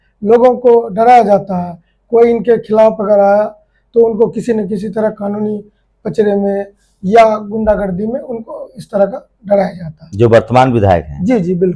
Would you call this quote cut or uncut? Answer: uncut